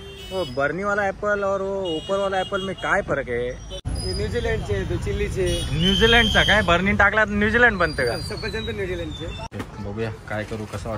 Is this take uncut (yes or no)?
no